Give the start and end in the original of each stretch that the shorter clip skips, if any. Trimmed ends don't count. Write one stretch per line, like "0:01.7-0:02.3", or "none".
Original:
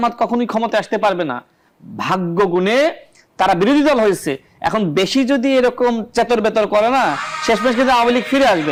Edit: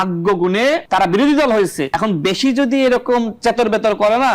0:03.0-0:03.3
0:04.3-0:04.6